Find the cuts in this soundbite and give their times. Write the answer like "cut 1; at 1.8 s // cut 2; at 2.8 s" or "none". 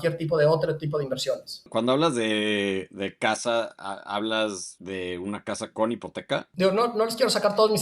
cut 1; at 1.7 s // cut 2; at 4.7 s // cut 3; at 6.5 s

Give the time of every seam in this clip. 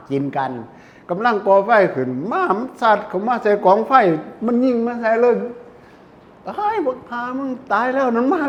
none

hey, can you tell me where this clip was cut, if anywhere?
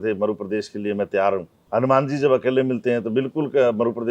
cut 1; at 1.6 s

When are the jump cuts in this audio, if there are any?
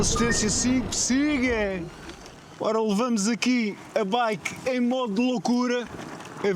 none

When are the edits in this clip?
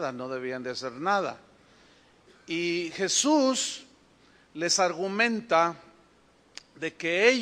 cut 1; at 3.6 s

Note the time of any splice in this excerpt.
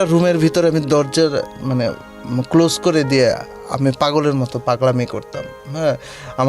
none

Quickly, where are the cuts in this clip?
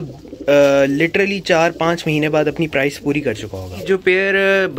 cut 1; at 3.8 s

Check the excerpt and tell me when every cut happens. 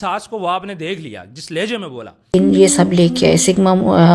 cut 1; at 2.2 s

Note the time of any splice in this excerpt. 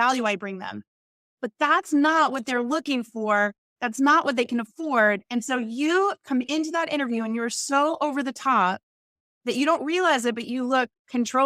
none

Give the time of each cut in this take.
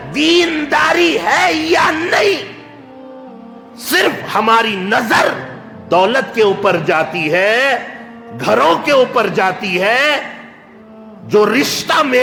none

